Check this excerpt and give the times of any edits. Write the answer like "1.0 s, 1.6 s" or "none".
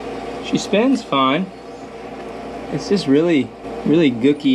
3.6 s